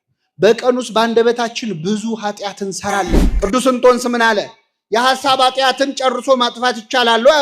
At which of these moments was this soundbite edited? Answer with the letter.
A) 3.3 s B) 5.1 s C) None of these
A